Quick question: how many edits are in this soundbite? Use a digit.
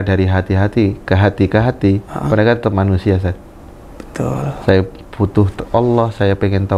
0